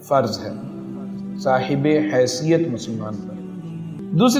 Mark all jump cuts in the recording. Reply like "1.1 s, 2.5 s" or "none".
3.5 s